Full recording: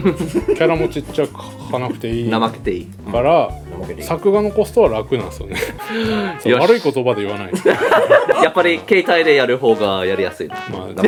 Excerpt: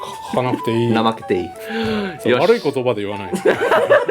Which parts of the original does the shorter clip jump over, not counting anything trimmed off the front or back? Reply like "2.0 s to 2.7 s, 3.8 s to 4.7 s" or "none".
2.9 s to 5.8 s

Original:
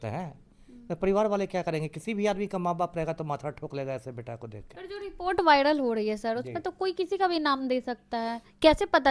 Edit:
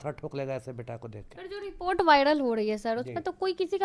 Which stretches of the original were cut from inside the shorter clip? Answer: none

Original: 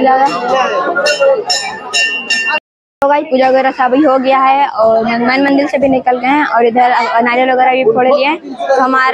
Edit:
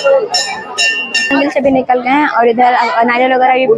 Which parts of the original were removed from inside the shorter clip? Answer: 2.5 s to 5.5 s

